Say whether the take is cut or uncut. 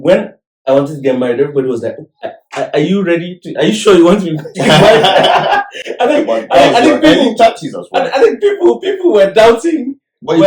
uncut